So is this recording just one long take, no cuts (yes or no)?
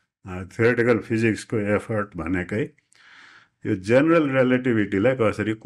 yes